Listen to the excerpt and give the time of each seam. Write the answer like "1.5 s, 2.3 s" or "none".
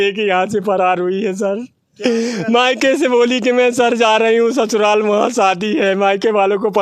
none